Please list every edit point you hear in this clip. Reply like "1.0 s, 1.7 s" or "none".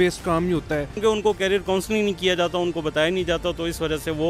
1.0 s

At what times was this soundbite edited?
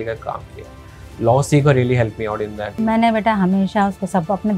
2.6 s

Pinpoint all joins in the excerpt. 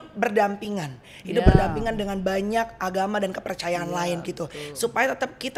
none

